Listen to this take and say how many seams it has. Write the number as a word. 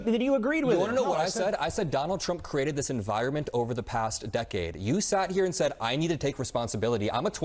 two